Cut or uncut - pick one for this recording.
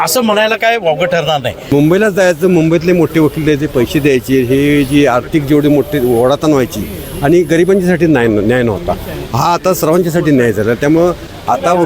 cut